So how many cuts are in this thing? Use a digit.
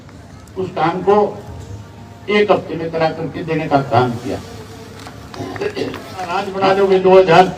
1